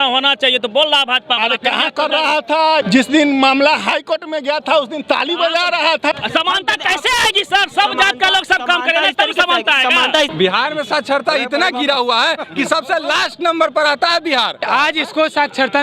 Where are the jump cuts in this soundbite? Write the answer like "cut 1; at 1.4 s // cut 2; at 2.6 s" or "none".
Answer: cut 1; at 2.8 s // cut 2; at 6.1 s // cut 3; at 10.3 s // cut 4; at 14.6 s